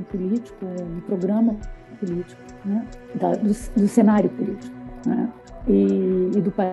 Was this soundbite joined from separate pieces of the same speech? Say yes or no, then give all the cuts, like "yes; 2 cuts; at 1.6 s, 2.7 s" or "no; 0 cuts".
yes; 2 cuts; at 3.0 s, 5.5 s